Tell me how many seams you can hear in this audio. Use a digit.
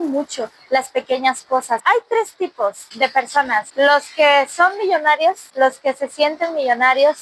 1